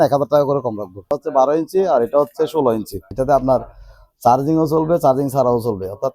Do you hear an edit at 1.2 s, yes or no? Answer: yes